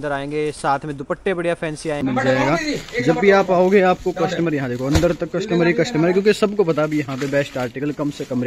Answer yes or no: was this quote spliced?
yes